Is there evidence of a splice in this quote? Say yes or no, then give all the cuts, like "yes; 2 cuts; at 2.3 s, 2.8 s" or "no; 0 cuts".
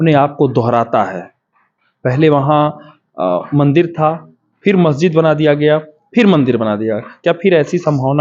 no; 0 cuts